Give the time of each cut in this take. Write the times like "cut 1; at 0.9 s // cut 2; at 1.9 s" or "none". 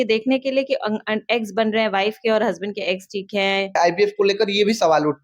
cut 1; at 3.8 s